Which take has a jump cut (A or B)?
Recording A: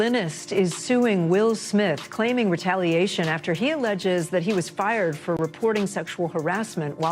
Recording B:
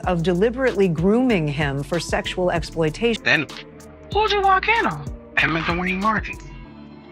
B